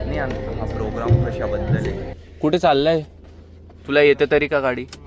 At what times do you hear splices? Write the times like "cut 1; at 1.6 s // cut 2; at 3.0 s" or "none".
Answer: cut 1; at 2.1 s